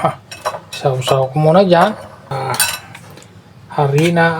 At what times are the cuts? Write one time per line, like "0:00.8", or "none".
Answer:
0:02.3